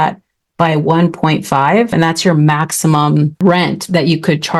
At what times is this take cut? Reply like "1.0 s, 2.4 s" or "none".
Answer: 1.9 s, 3.4 s